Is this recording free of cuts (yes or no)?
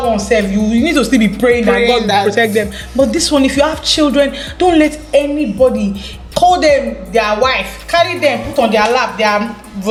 yes